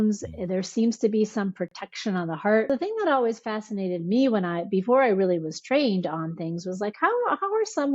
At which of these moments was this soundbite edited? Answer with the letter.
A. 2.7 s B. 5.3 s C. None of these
A